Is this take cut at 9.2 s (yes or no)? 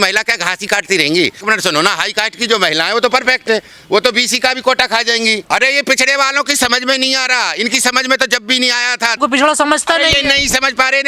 yes